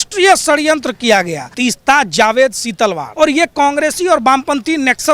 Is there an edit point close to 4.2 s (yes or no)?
no